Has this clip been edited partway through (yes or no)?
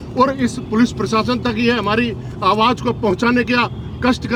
no